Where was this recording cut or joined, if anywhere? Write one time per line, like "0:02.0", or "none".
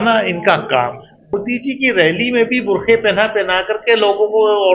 0:01.3

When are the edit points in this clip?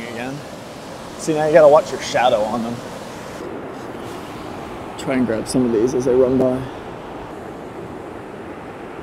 0:03.4
0:07.3

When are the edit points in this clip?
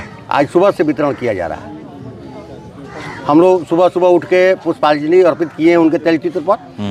none

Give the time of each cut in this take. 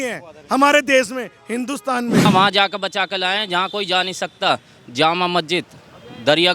0:02.2

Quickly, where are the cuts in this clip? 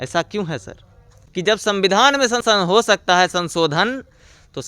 0:01.1
0:02.4

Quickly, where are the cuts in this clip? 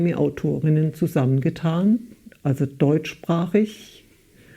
none

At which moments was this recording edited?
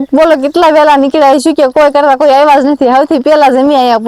none

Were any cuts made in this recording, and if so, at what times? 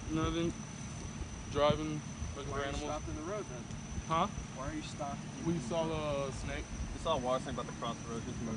none

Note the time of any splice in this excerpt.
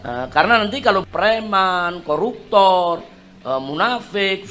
none

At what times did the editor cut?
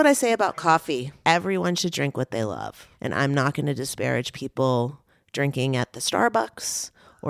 0:01.1
0:02.9

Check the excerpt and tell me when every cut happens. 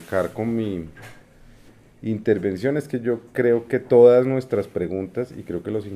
0:04.4

